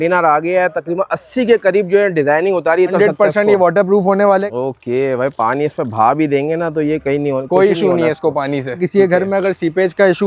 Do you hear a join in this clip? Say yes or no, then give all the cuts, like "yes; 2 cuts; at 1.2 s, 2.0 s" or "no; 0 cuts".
yes; 3 cuts; at 2.9 s, 4.5 s, 8.8 s